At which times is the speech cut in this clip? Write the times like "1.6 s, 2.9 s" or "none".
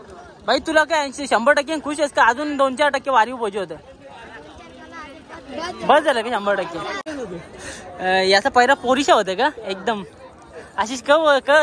7.1 s

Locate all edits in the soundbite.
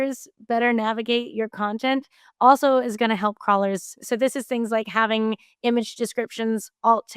4.0 s

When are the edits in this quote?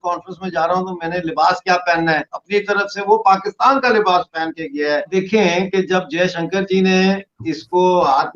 5.1 s

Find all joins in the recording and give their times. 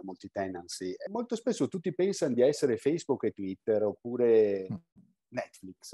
1.0 s

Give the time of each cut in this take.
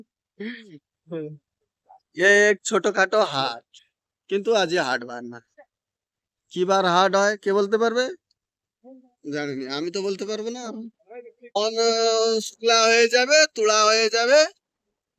11.6 s

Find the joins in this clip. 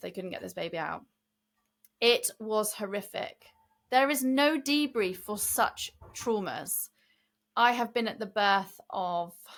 none

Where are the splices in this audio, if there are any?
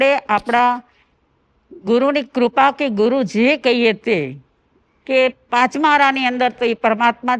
none

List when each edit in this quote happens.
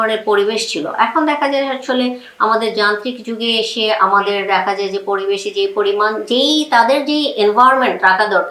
none

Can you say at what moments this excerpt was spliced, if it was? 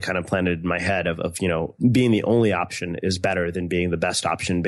1.7 s

